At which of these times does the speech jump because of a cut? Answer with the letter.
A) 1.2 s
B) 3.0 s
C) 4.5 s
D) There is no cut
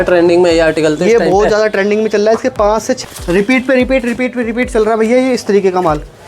B